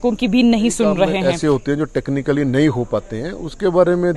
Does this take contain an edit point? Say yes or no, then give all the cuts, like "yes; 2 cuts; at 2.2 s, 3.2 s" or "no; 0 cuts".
yes; 1 cut; at 1.2 s